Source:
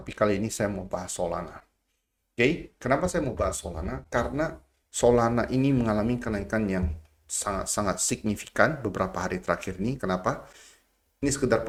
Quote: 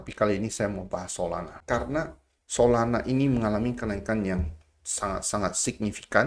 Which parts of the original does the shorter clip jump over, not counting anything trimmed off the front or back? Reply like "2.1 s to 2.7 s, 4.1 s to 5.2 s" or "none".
1.5 s to 4.0 s